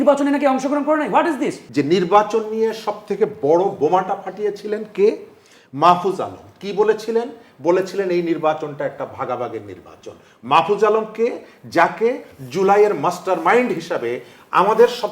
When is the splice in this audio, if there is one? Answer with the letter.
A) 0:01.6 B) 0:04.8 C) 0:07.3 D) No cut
A